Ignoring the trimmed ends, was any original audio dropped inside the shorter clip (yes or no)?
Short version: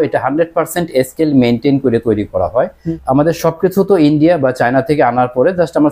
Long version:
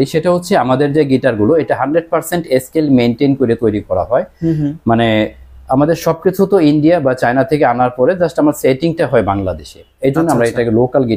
yes